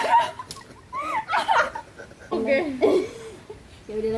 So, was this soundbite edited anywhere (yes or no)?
yes